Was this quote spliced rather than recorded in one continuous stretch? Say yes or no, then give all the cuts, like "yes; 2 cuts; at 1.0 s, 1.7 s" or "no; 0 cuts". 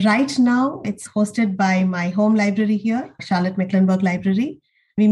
yes; 2 cuts; at 0.9 s, 3.1 s